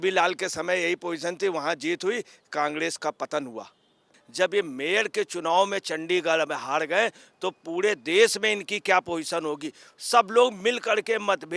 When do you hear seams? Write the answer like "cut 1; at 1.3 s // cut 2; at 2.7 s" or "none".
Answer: cut 1; at 4.2 s